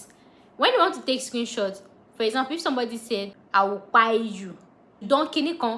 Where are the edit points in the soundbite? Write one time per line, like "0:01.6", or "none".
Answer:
0:03.4
0:05.0